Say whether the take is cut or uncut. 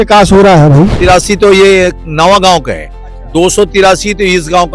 cut